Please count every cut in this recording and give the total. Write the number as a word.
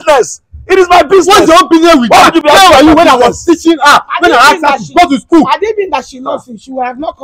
zero